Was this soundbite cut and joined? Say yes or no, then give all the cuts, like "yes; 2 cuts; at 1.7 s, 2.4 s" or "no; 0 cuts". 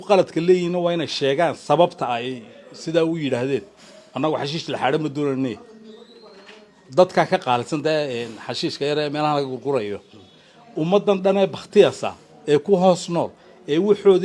no; 0 cuts